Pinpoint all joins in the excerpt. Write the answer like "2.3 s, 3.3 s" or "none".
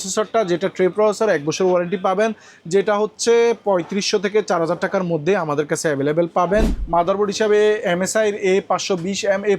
6.8 s